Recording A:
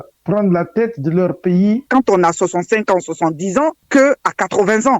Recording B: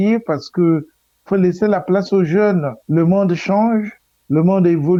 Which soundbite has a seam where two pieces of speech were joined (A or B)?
A